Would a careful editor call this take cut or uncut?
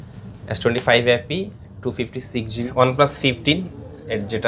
cut